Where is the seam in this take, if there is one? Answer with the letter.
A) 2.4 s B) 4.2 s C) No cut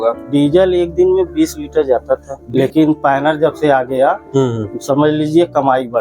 A